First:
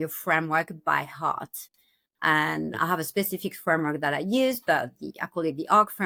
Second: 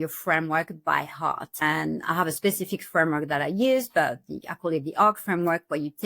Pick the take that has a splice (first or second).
second